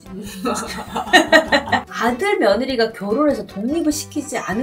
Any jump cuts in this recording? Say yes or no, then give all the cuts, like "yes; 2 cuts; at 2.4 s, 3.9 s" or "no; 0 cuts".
yes; 1 cut; at 1.9 s